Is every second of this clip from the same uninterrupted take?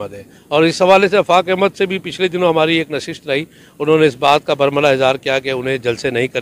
yes; 0 cuts

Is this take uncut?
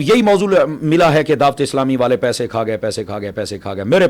yes; 0 cuts

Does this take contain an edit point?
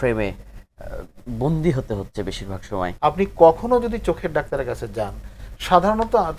yes; 1 cut; at 2.9 s

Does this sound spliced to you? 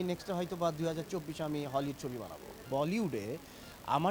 yes; 1 cut; at 2.6 s

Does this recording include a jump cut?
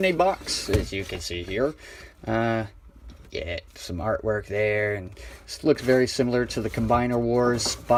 no; 0 cuts

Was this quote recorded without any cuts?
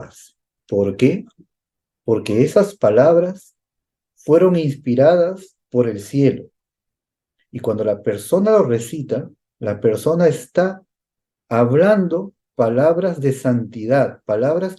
yes; 0 cuts

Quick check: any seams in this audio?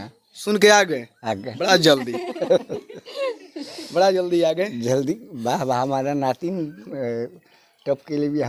no; 0 cuts

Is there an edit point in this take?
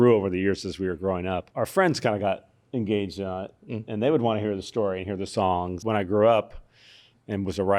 yes; 2 cuts; at 1.5 s, 5.7 s

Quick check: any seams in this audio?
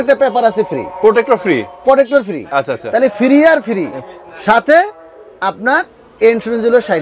no; 0 cuts

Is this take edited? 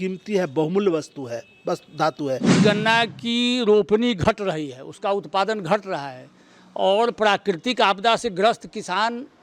yes; 1 cut; at 2.6 s

